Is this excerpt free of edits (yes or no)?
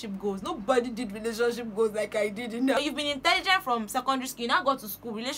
no